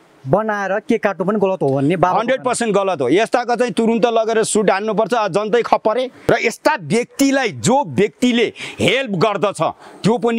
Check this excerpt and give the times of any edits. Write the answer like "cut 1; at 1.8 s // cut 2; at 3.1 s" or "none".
cut 1; at 6.1 s